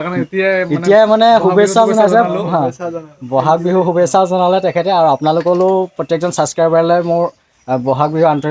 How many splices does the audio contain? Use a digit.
0